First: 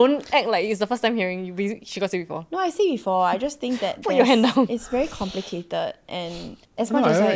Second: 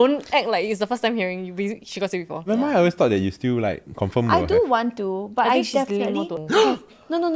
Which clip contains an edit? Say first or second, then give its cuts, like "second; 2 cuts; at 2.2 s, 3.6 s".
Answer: second; 2 cuts; at 2.5 s, 6.4 s